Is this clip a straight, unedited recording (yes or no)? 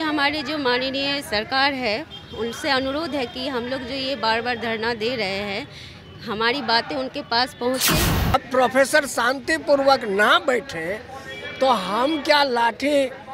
no